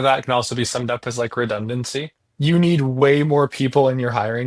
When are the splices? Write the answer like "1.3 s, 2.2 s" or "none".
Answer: 2.1 s

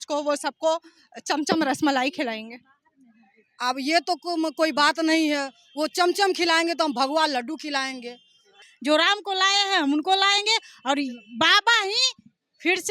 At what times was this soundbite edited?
8.7 s

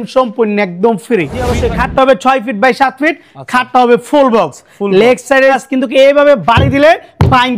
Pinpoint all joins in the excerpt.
1.5 s, 5.6 s

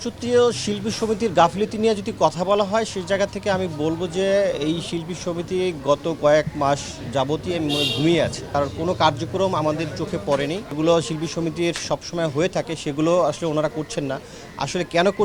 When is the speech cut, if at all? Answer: 8.5 s, 10.7 s

